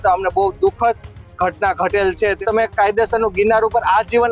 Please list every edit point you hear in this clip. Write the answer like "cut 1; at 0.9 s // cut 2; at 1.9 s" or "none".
cut 1; at 2.4 s